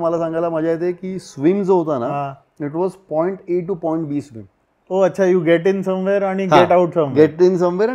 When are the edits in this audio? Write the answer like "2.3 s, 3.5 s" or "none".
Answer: none